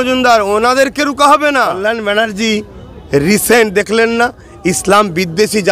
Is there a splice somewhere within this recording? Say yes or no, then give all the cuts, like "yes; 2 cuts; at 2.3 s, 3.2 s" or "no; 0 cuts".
yes; 1 cut; at 1.8 s